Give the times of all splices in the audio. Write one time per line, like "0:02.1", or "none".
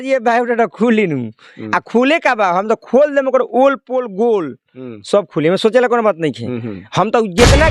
none